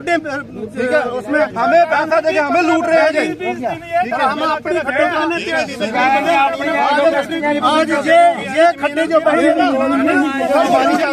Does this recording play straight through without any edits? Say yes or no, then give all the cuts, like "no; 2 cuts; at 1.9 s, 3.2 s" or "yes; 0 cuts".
yes; 0 cuts